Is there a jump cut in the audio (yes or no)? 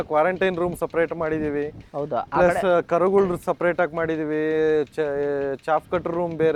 no